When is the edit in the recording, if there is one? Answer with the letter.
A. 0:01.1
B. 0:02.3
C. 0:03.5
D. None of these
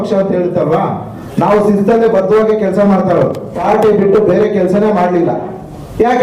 C